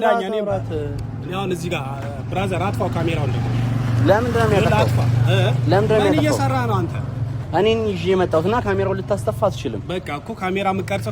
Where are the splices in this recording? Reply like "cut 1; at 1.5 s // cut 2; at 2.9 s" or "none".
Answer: cut 1; at 1.0 s